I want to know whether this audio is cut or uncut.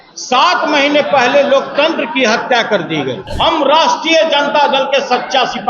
cut